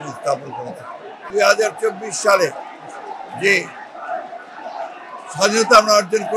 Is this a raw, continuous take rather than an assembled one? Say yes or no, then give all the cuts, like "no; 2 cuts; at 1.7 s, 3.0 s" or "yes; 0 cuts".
no; 1 cut; at 1.3 s